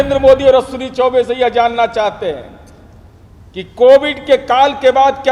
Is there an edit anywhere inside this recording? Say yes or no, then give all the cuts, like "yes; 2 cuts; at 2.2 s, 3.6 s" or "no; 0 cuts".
no; 0 cuts